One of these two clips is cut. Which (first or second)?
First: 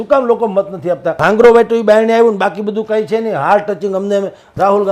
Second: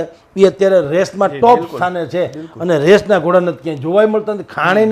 first